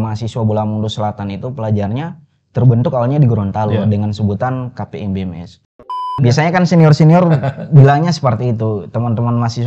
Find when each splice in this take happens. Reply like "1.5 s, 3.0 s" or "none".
6.0 s